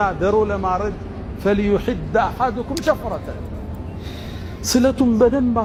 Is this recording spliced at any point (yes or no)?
no